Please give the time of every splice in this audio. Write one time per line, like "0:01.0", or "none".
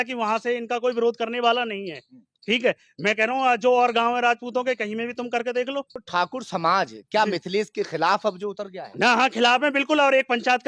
0:06.0

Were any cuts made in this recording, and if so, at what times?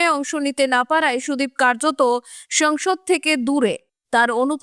none

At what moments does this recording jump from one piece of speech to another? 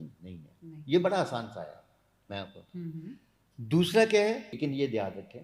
0:04.5

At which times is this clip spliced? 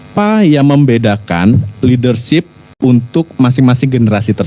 0:02.6

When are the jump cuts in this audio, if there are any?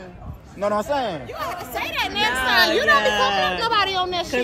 none

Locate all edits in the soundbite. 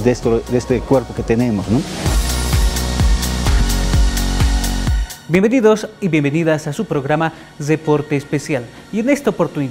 0:03.7

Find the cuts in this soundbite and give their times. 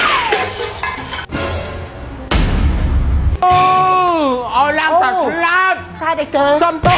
none

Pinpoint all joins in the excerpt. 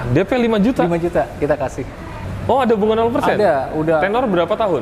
0:02.3

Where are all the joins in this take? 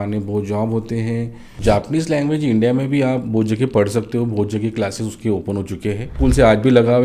0:01.4
0:06.1

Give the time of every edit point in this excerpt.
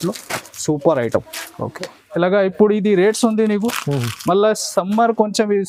none

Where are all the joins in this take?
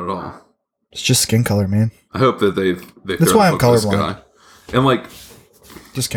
0:02.0

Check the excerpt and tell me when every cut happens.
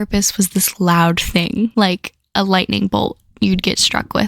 0:01.7

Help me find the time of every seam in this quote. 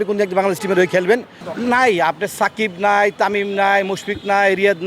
0:01.4

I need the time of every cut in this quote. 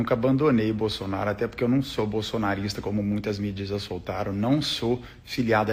none

